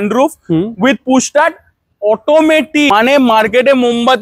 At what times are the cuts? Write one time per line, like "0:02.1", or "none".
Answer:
0:02.9